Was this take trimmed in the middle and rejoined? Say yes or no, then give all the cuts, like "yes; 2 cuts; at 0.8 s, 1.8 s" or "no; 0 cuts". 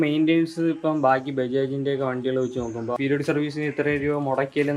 yes; 1 cut; at 3.0 s